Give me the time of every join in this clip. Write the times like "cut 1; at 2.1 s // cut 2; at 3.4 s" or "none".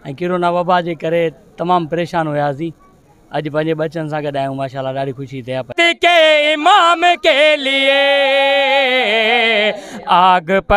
cut 1; at 5.7 s